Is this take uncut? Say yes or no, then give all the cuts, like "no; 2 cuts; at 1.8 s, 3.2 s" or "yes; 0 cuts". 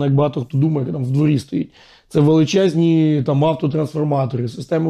yes; 0 cuts